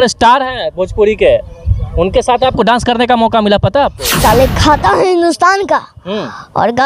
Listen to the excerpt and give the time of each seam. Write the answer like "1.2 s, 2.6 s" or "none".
4.0 s